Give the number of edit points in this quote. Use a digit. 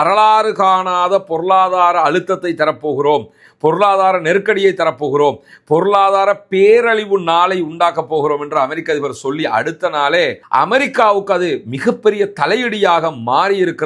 0